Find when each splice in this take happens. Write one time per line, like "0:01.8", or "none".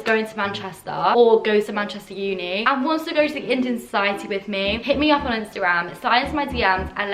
0:01.1
0:02.6
0:04.8